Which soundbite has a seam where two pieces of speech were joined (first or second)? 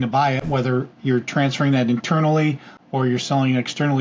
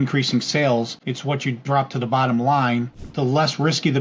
second